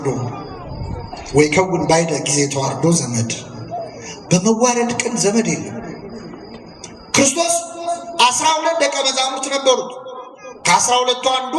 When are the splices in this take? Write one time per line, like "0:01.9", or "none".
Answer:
none